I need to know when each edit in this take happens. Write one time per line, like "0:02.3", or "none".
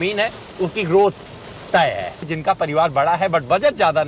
0:02.3